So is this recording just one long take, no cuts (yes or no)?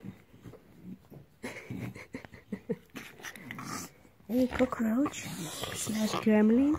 yes